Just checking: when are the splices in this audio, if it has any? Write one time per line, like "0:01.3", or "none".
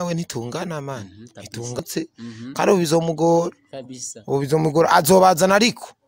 0:01.8